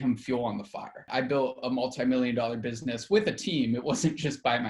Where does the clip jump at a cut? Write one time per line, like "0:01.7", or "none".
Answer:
0:01.1